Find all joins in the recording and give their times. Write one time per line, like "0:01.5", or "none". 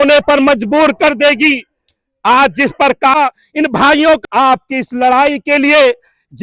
0:03.1
0:04.2